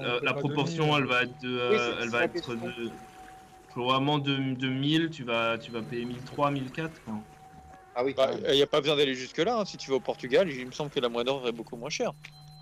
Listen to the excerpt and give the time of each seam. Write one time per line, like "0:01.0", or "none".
none